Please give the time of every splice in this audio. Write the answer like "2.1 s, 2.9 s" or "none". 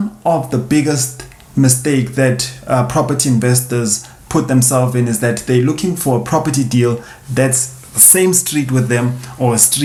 none